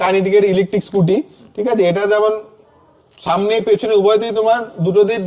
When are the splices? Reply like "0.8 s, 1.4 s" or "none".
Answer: none